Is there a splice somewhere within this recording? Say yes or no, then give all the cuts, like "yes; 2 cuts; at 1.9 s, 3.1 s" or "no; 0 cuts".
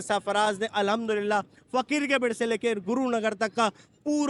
no; 0 cuts